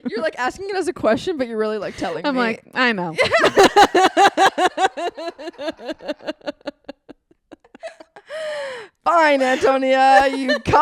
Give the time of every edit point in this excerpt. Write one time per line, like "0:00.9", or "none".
none